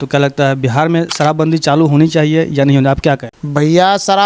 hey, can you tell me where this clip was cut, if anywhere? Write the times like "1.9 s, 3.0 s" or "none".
3.3 s